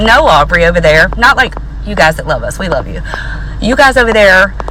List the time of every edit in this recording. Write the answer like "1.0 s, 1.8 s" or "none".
none